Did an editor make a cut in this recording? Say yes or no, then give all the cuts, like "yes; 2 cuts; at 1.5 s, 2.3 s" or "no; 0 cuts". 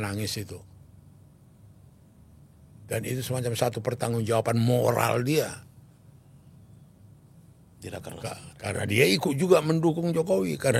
no; 0 cuts